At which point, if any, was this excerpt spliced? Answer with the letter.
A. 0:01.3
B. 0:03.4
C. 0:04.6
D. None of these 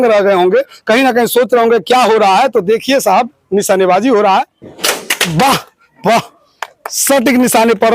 C